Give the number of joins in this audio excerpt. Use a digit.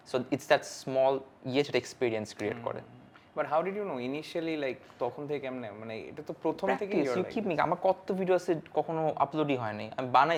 0